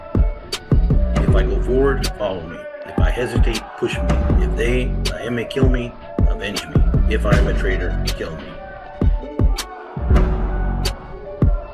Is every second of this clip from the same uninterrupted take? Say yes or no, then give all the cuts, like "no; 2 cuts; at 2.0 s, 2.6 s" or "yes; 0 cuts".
no; 1 cut; at 8.6 s